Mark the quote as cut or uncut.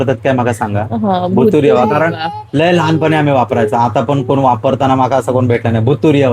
uncut